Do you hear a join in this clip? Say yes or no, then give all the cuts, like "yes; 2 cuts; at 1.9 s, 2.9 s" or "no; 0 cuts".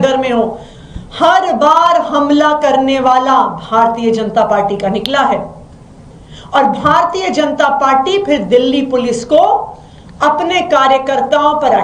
no; 0 cuts